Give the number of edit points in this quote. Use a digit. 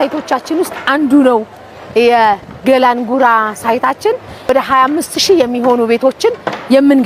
1